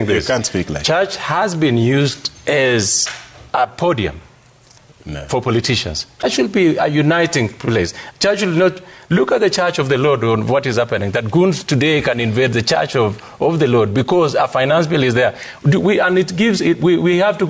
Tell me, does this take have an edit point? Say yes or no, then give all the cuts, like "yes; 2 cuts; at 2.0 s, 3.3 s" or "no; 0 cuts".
yes; 1 cut; at 6.2 s